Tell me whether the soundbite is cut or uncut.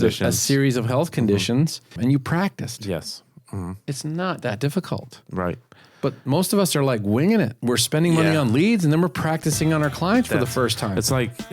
cut